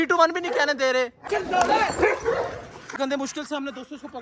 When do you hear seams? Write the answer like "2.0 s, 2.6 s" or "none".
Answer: 1.3 s, 2.9 s

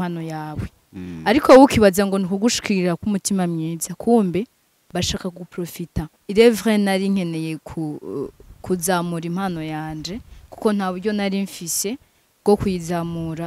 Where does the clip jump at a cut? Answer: 6.2 s

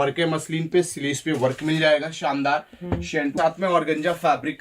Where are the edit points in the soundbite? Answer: 3.4 s

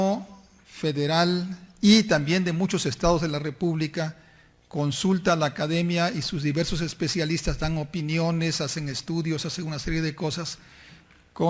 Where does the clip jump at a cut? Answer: none

